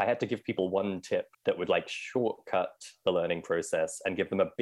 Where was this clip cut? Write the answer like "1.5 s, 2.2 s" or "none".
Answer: 1.3 s